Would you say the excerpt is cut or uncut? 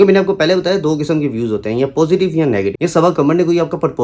cut